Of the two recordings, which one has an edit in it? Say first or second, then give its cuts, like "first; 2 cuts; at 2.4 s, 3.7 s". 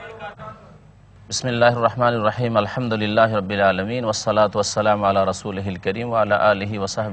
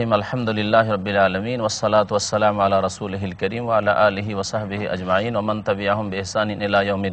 first; 1 cut; at 1.3 s